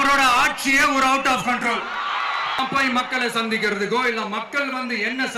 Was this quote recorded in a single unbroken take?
no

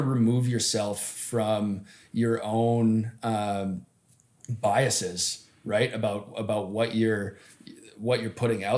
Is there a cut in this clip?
no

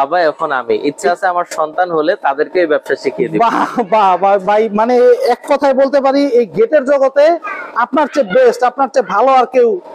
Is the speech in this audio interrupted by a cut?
no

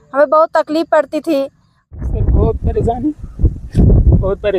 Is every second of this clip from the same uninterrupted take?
no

